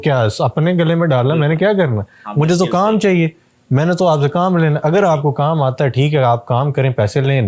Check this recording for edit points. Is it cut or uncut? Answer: uncut